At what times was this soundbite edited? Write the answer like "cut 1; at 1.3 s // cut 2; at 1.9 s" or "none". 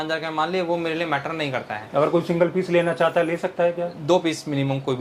none